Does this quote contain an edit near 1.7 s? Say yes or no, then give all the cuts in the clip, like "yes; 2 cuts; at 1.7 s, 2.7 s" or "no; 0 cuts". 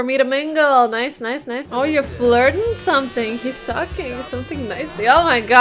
yes; 1 cut; at 1.7 s